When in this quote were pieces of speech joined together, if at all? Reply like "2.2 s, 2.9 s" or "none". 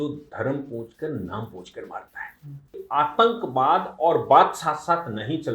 2.8 s